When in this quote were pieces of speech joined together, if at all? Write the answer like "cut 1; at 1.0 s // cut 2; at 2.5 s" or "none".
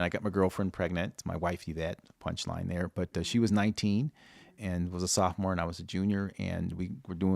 cut 1; at 1.2 s // cut 2; at 4.5 s